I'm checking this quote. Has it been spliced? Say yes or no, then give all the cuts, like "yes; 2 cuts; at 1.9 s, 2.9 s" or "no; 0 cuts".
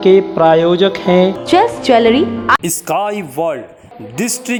no; 0 cuts